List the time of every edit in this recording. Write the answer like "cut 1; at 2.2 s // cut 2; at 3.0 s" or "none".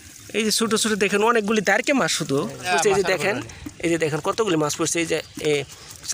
cut 1; at 2.7 s